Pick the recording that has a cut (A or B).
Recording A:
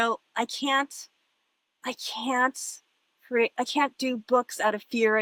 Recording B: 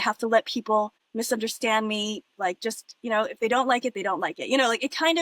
B